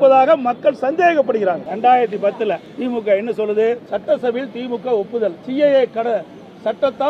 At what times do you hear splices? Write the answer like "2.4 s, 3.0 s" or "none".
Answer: 1.7 s, 2.7 s, 3.9 s, 5.4 s